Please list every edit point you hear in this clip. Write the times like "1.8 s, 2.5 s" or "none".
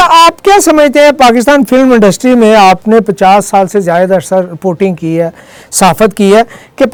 none

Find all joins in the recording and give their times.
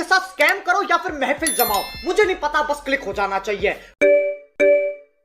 4.0 s

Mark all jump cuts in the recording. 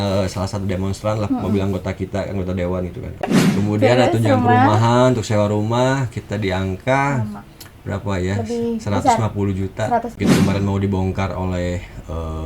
3.2 s, 10.1 s

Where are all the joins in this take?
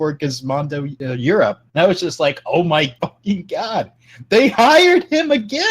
1.2 s, 2.9 s

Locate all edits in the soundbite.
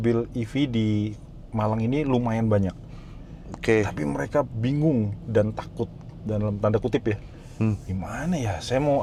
none

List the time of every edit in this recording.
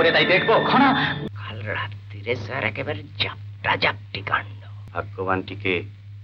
1.2 s

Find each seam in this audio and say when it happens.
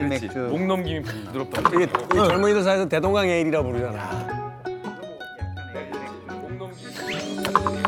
none

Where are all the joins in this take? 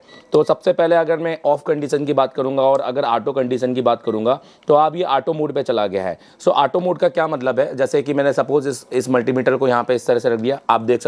none

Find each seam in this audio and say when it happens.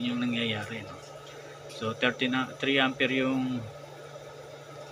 none

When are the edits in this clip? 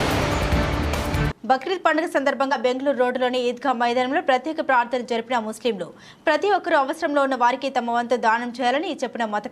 none

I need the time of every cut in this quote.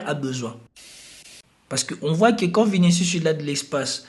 1.1 s

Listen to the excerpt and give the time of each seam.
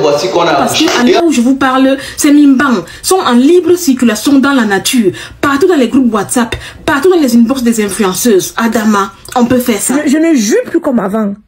1.2 s, 9.8 s

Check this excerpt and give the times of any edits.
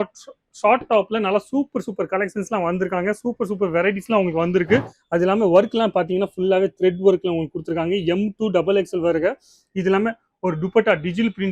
5.0 s

